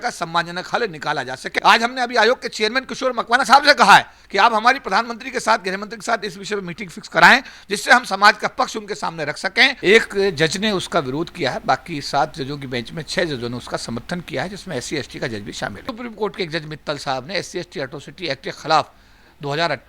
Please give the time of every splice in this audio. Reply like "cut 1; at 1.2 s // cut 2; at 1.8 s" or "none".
cut 1; at 1.4 s // cut 2; at 9.8 s // cut 3; at 15.9 s